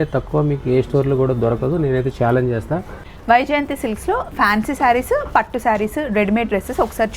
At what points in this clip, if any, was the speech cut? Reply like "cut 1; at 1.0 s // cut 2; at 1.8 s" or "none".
cut 1; at 3.1 s

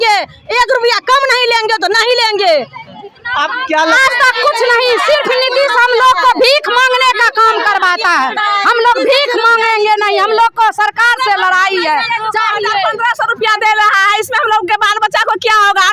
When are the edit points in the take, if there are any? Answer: cut 1; at 4.0 s

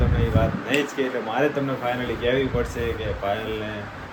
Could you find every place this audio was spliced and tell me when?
none

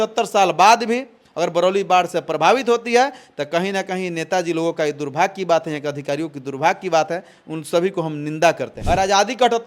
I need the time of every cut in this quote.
cut 1; at 8.7 s

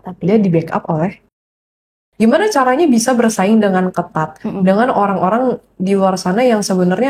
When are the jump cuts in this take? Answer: cut 1; at 1.6 s

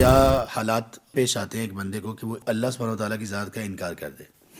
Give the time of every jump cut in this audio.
cut 1; at 1.1 s // cut 2; at 2.4 s

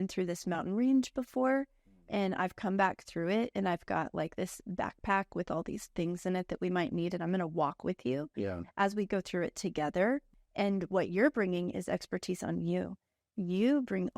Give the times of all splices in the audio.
cut 1; at 10.3 s

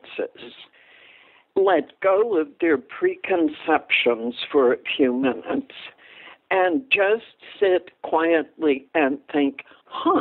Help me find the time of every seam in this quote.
none

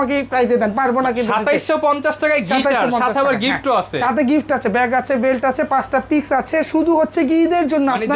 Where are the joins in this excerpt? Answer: none

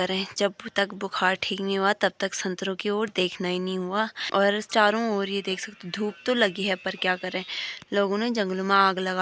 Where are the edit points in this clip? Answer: cut 1; at 4.2 s

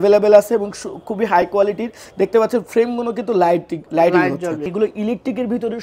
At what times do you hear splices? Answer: cut 1; at 4.6 s

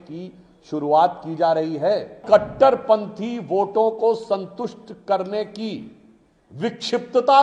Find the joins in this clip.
cut 1; at 2.2 s

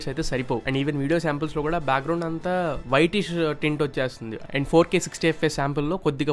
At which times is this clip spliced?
cut 1; at 4.4 s

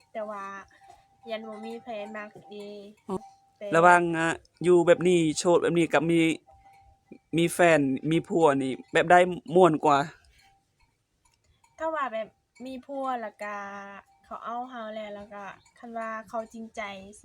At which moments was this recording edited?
cut 1; at 3.2 s

